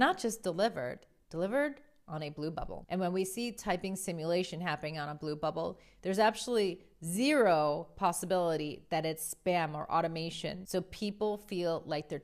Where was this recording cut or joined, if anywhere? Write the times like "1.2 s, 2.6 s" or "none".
2.8 s, 10.6 s